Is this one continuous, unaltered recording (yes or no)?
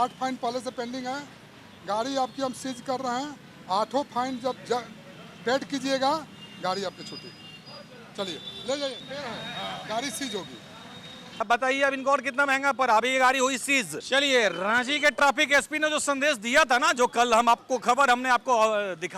no